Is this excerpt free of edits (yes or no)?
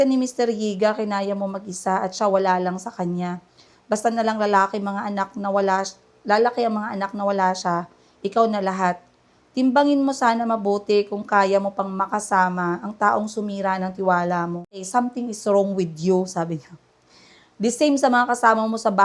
no